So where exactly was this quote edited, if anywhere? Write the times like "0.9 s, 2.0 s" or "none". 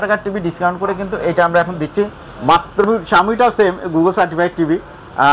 2.8 s

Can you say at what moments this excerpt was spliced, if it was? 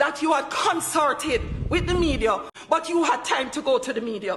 2.5 s

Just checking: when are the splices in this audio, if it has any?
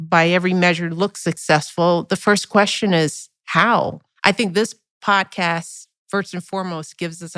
4.0 s

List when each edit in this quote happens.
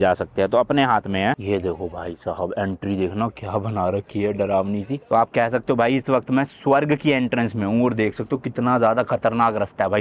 1.3 s, 5.0 s

